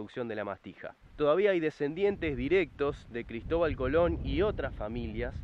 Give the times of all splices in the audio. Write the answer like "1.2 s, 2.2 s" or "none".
1.0 s